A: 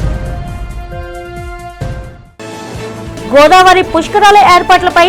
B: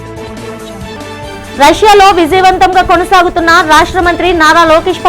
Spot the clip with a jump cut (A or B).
B